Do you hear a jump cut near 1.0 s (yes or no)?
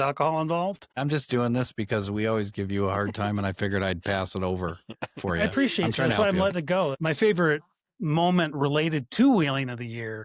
yes